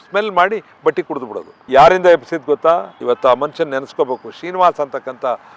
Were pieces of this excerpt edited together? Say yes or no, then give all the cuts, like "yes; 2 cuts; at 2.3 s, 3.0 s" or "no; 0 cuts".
yes; 1 cut; at 1.5 s